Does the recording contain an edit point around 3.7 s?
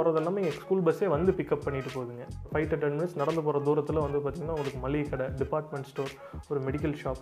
no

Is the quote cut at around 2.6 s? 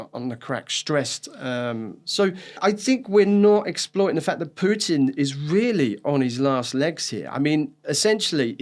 yes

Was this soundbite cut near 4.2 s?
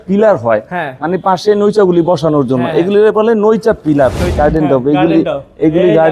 yes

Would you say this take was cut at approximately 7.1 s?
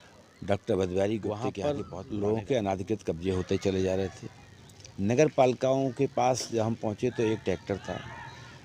no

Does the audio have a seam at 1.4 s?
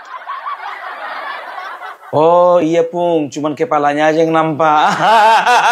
yes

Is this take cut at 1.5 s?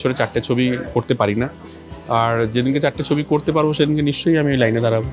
no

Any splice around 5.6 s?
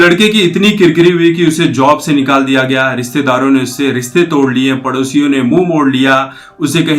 no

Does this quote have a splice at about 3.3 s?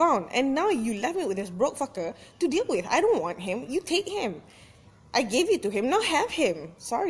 yes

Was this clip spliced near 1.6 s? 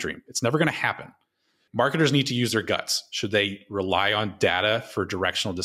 yes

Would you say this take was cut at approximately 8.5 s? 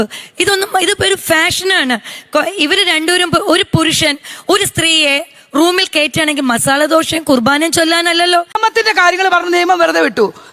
yes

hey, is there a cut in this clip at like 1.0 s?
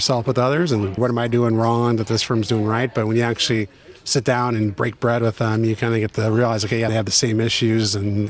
yes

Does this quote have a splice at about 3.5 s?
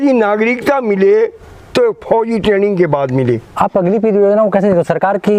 yes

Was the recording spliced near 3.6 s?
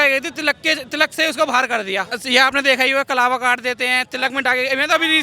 no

